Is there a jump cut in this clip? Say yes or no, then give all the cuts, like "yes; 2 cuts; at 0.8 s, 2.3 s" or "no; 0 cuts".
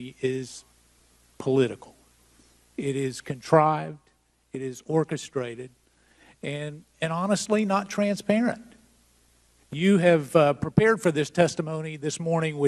yes; 1 cut; at 8.5 s